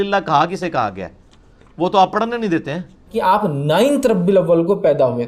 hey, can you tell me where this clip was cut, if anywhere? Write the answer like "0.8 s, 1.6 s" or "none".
3.1 s

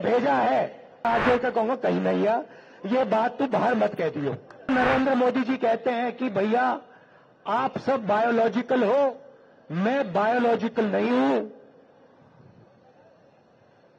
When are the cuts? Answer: 1.0 s, 4.7 s

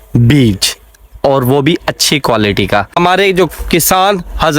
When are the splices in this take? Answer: 3.0 s

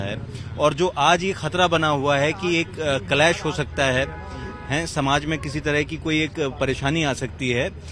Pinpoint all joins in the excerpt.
none

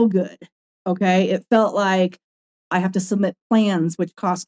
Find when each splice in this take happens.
2.6 s

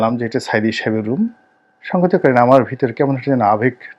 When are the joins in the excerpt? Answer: none

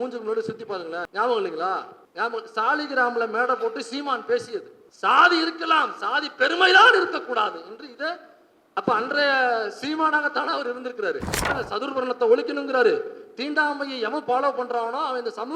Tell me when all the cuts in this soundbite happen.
1.1 s, 2.0 s, 4.8 s, 11.5 s

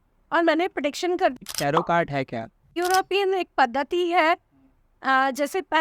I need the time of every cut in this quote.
1.4 s, 2.8 s

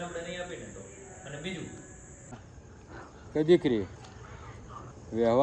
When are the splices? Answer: 2.4 s

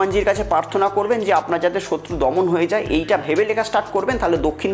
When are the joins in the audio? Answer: none

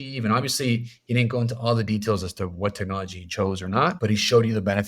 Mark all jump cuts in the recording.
4.0 s

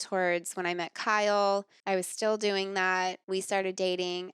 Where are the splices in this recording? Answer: 1.7 s, 3.2 s

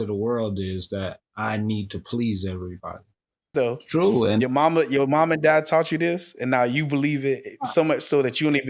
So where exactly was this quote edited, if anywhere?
3.5 s

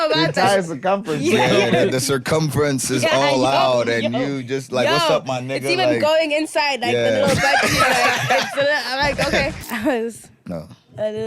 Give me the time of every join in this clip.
9.6 s

